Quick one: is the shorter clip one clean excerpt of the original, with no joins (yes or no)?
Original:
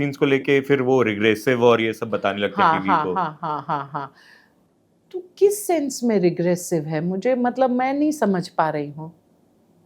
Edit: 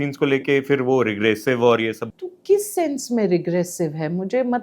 no